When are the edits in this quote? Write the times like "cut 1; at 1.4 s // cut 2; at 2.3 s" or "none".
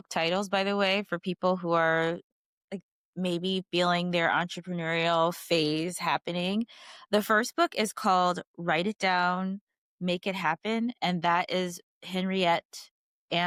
none